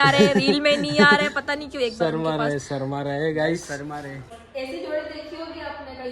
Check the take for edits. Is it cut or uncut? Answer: cut